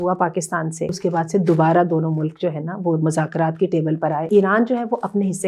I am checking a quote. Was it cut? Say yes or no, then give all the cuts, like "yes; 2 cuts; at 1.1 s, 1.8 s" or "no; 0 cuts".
yes; 2 cuts; at 0.9 s, 4.3 s